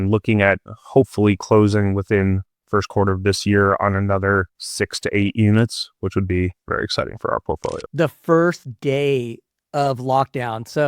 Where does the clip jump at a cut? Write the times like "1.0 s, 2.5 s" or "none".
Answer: 7.8 s